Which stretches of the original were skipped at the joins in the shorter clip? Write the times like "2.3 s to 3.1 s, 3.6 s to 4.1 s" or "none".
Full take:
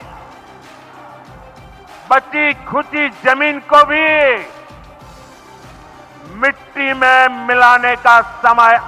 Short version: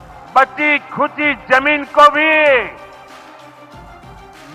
none